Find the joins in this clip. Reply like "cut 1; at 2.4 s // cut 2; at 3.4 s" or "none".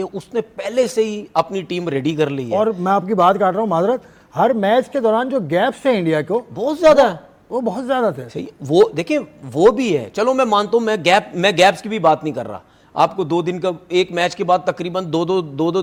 none